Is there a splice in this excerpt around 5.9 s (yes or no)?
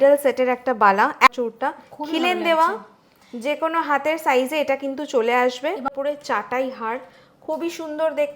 yes